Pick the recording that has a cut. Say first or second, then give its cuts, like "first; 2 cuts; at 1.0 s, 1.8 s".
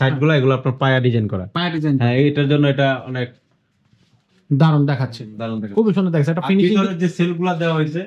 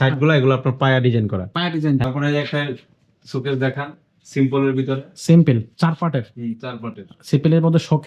second; 1 cut; at 2.0 s